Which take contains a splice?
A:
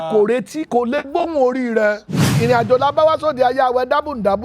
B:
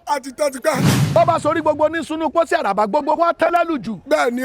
A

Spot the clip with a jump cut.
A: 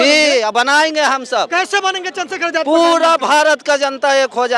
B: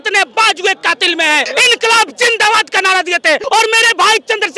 B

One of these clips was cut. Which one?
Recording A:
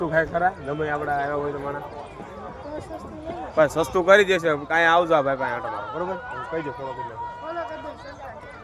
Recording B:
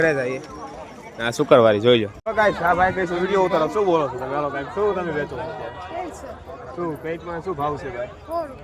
B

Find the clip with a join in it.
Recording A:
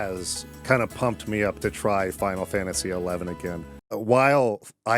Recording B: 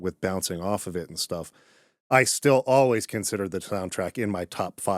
A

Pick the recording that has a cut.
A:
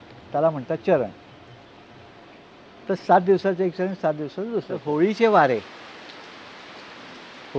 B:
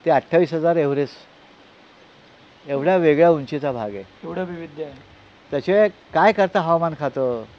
A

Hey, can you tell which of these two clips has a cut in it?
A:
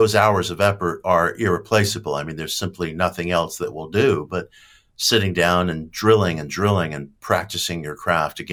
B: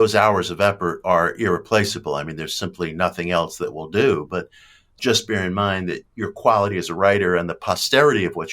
B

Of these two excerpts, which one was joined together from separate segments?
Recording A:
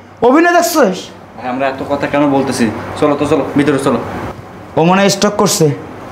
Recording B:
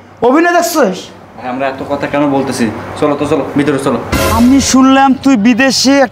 B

